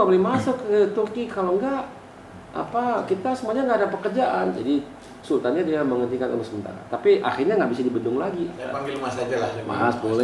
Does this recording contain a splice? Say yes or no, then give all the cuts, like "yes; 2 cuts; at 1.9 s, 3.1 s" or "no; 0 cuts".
yes; 1 cut; at 8.8 s